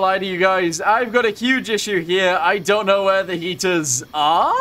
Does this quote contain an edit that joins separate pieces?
no; 0 cuts

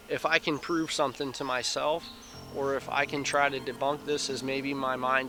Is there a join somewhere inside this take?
no; 0 cuts

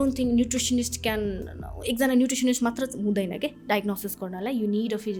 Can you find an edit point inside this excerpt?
no; 0 cuts

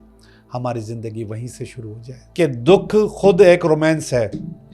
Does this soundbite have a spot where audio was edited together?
yes; 1 cut; at 2.2 s

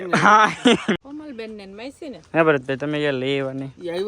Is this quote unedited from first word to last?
no; 1 cut; at 1.0 s

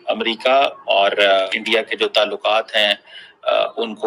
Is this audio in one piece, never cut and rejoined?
no; 1 cut; at 1.5 s

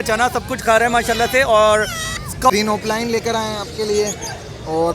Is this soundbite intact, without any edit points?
no; 1 cut; at 2.5 s

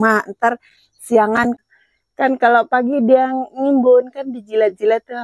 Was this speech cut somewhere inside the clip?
yes; 1 cut; at 1.6 s

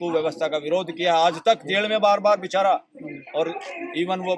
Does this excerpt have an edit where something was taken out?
no; 0 cuts

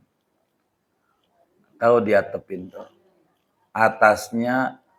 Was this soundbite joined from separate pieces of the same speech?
no; 0 cuts

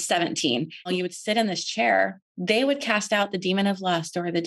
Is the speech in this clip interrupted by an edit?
yes; 2 cuts; at 0.9 s, 2.3 s

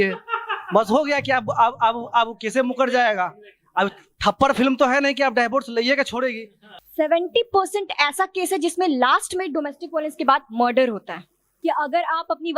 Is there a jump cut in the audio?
yes; 2 cuts; at 6.8 s, 11.4 s

